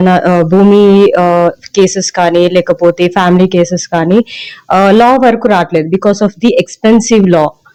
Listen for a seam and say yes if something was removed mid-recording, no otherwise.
no